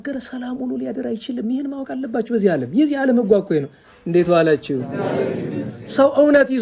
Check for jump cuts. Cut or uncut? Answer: uncut